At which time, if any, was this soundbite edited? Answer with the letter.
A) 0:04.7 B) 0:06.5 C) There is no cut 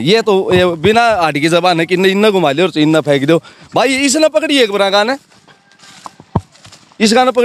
C